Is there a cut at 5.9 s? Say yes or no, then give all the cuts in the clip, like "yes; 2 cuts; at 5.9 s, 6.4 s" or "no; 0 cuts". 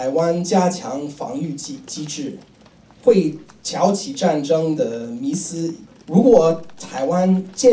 yes; 1 cut; at 5.9 s